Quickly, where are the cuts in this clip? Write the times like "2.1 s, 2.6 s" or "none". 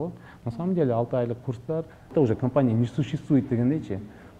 2.1 s